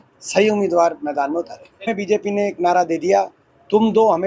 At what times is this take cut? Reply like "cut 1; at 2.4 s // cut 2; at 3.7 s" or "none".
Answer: cut 1; at 1.9 s